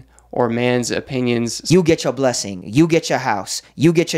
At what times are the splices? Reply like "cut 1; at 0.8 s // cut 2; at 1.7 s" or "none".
cut 1; at 1.6 s